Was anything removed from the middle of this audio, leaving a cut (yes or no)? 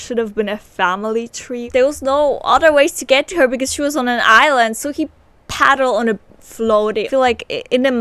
yes